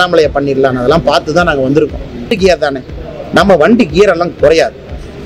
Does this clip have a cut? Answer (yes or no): yes